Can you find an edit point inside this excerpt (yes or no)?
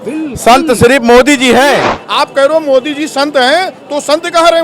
yes